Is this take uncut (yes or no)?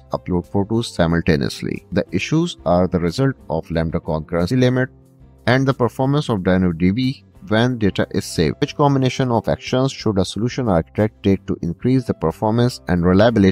no